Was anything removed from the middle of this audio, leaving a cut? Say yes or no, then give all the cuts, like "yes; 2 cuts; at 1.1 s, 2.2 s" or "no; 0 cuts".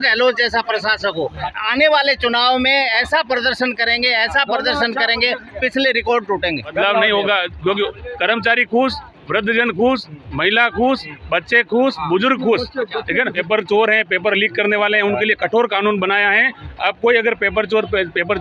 yes; 3 cuts; at 1.5 s, 6.7 s, 13.4 s